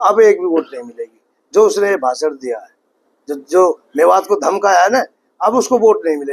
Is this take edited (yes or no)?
no